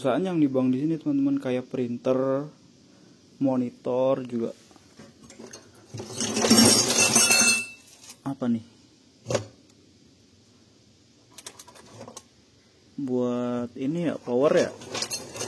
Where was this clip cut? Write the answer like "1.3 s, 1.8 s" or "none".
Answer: none